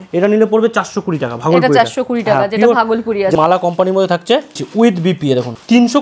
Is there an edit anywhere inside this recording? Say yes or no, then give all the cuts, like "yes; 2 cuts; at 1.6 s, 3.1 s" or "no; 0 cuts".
yes; 1 cut; at 3.4 s